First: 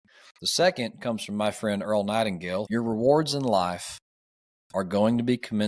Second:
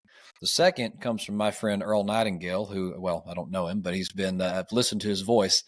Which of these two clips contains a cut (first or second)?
first